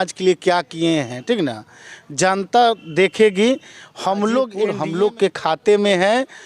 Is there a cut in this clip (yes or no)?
yes